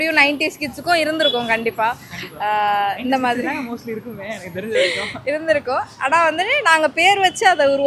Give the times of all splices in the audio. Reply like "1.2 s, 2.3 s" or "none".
none